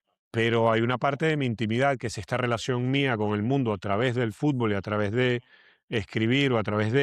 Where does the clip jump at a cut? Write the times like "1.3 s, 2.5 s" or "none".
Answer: none

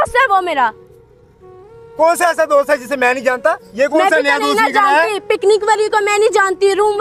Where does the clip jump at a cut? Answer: none

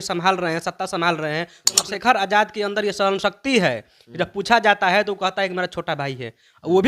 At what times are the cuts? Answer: 1.8 s

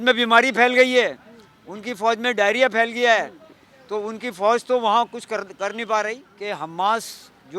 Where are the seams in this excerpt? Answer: 6.3 s

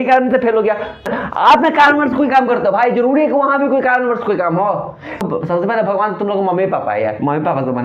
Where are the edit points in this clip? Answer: 1.1 s, 5.2 s

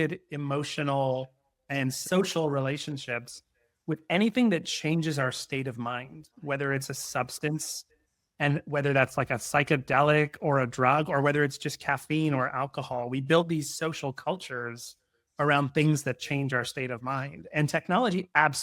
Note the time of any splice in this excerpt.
2.0 s

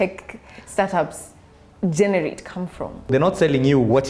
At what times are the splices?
3.1 s

